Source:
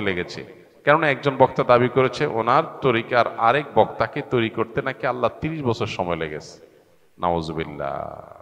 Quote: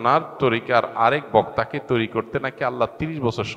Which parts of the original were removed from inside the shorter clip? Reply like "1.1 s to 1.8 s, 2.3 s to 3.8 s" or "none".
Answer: none